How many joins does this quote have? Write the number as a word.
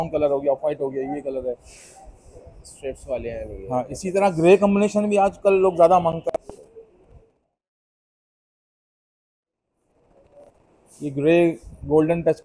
zero